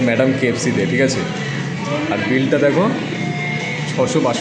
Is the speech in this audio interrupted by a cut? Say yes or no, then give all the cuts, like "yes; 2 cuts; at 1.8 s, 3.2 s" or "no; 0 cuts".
no; 0 cuts